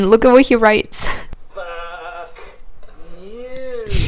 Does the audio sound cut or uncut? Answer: cut